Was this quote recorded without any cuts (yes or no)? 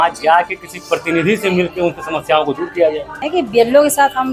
no